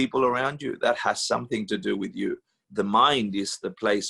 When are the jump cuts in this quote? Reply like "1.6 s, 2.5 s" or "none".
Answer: 2.5 s